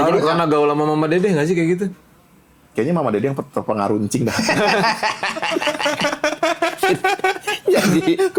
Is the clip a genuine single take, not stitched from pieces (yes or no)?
yes